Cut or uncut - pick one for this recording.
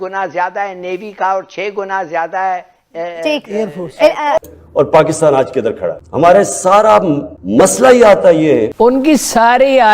cut